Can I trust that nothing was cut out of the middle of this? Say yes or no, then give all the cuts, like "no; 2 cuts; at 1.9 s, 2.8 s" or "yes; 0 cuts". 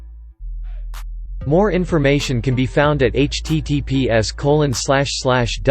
no; 1 cut; at 1.5 s